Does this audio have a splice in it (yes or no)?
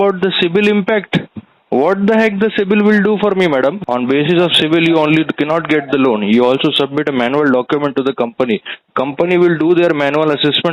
yes